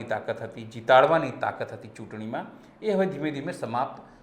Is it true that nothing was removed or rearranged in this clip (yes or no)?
yes